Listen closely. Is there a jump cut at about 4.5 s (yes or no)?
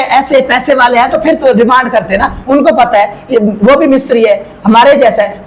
no